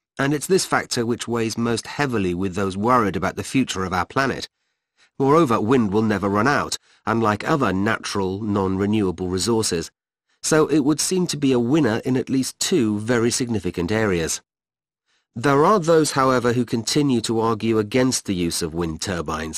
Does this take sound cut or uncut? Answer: cut